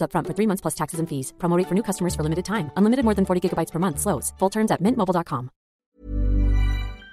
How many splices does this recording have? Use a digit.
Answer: 1